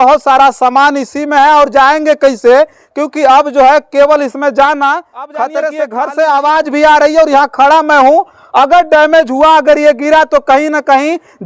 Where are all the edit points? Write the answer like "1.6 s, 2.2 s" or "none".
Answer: 5.8 s